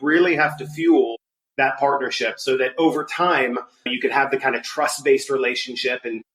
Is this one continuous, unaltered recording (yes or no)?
yes